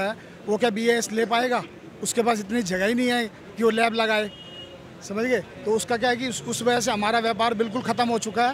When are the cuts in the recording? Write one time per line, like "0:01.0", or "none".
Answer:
none